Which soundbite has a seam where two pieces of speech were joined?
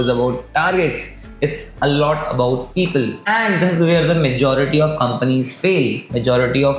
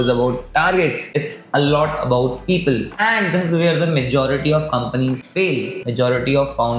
second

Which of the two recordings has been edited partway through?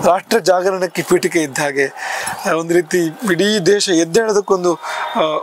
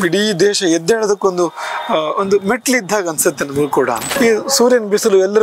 second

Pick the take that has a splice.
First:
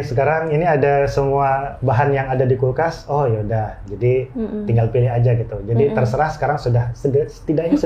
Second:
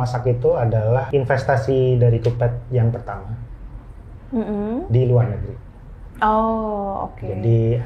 second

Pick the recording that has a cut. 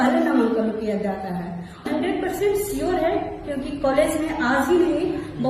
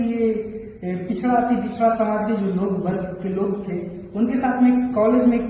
first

